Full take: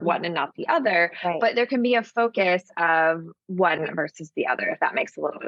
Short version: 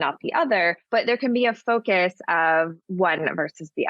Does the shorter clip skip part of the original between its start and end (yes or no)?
yes